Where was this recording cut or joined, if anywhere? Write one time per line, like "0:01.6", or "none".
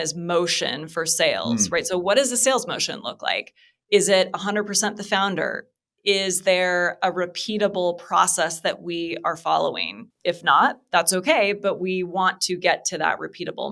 none